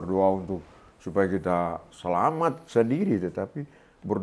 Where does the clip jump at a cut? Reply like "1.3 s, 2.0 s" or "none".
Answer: none